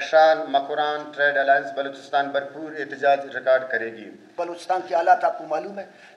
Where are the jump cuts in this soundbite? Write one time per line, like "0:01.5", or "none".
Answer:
0:04.4